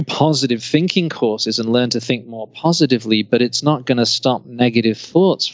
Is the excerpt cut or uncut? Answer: uncut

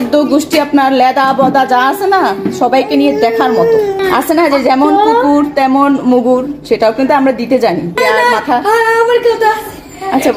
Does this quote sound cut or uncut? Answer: cut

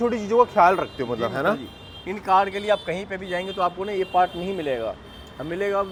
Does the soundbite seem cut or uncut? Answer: uncut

